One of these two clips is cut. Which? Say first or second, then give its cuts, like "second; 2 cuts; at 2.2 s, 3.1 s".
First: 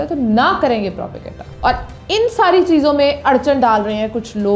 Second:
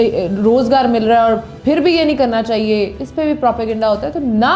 first; 1 cut; at 1.5 s